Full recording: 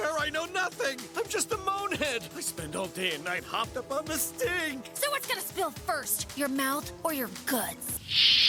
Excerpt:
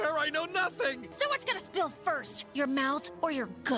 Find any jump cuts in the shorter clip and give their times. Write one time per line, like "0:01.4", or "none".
0:01.1